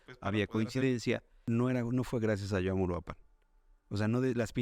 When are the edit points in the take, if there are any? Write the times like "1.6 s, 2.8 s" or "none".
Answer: 1.4 s